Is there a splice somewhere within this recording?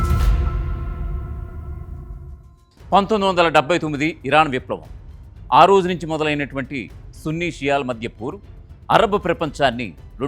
yes; 1 cut; at 2.3 s

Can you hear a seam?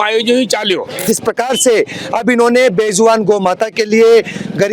yes; 1 cut; at 1.0 s

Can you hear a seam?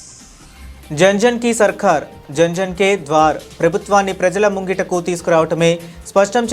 yes; 1 cut; at 0.9 s

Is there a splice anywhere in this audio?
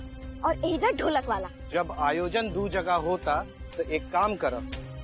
yes; 1 cut; at 1.6 s

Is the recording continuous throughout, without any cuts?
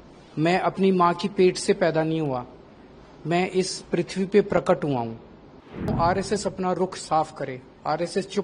no; 1 cut; at 5.9 s

